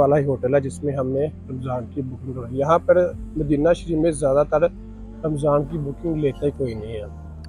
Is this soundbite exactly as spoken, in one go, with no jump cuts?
yes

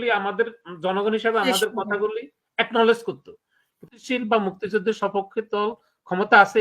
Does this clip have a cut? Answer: yes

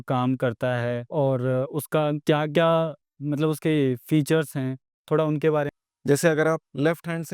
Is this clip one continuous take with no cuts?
no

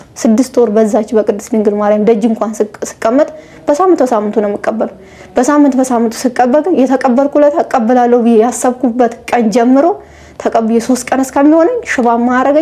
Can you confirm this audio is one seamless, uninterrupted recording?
yes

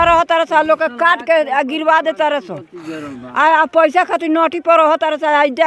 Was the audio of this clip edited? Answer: no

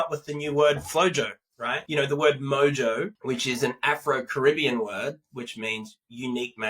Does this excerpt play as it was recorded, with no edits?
no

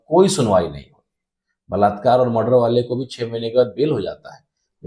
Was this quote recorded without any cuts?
yes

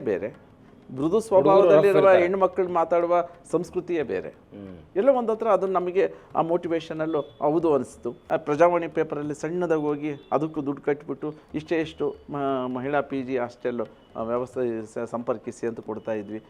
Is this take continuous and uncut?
no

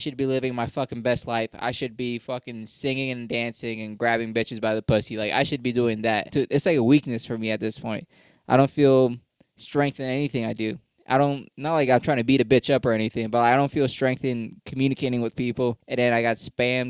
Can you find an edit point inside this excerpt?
yes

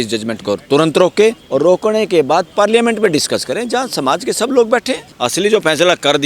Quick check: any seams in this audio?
yes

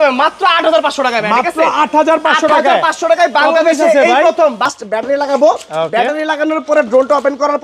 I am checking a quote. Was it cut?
yes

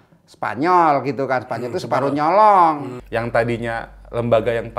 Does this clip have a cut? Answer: yes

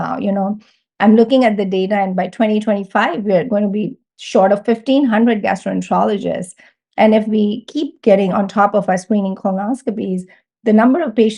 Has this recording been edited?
no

